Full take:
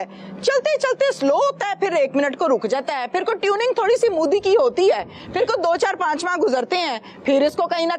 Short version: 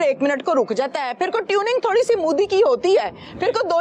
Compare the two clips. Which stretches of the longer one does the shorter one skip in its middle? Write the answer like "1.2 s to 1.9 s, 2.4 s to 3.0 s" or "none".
none